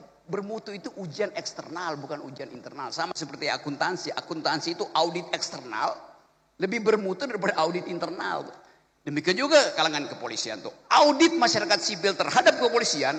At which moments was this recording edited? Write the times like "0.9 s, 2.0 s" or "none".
none